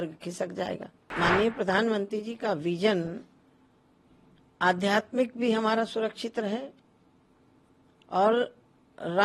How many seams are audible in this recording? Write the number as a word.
one